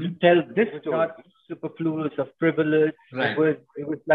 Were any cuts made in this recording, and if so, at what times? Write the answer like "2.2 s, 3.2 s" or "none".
0.9 s